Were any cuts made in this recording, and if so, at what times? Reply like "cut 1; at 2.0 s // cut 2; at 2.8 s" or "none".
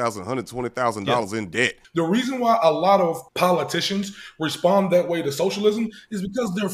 cut 1; at 1.8 s // cut 2; at 3.3 s